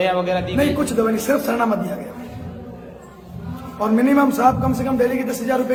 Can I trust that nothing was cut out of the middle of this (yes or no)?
yes